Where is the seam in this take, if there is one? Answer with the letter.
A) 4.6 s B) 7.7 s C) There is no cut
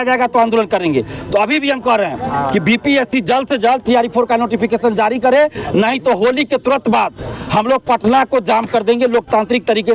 C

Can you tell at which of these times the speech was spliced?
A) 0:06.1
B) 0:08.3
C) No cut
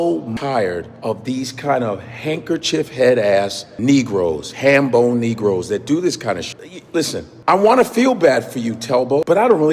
C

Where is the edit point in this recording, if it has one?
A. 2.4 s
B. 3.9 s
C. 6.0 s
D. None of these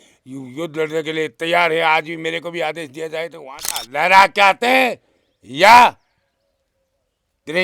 B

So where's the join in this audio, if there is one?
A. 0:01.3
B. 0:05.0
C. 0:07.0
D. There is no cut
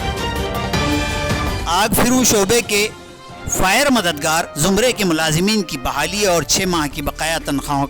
A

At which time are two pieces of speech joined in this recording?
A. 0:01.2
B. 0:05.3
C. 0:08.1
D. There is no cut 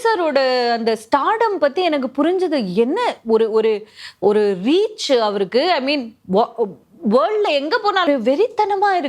C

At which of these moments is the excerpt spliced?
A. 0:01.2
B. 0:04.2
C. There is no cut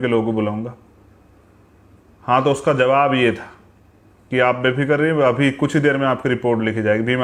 C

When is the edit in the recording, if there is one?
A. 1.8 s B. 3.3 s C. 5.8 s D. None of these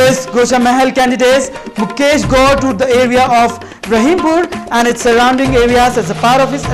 D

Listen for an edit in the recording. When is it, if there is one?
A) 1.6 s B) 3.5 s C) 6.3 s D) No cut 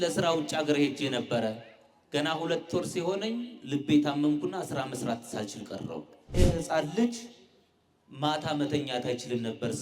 C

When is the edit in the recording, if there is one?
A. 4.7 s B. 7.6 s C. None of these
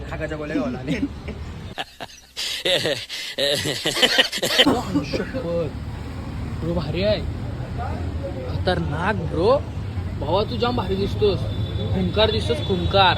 A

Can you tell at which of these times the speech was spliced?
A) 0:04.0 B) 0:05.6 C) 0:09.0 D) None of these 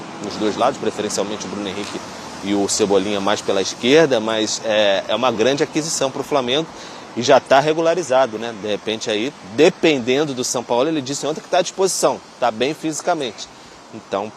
D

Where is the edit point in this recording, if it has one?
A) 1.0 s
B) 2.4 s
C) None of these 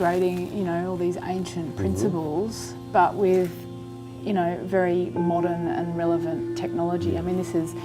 B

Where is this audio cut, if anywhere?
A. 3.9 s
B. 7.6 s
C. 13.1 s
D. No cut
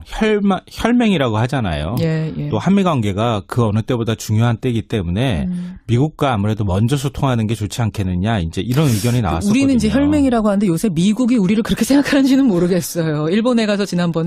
D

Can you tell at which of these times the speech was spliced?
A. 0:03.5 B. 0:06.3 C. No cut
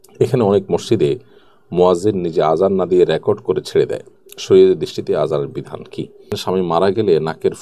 B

